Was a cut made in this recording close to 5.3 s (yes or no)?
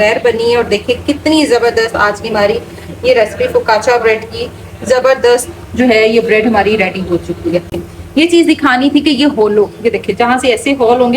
no